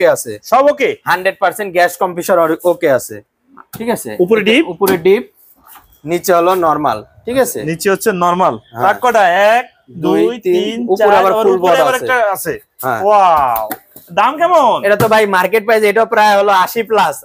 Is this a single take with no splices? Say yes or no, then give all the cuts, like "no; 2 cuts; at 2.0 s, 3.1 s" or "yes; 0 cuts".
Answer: yes; 0 cuts